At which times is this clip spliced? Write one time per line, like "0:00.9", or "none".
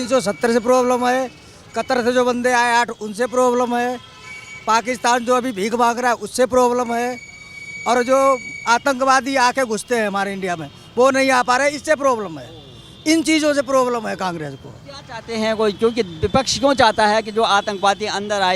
none